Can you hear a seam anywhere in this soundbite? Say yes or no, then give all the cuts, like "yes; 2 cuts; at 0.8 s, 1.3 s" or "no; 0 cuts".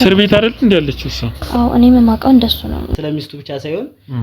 yes; 1 cut; at 2.9 s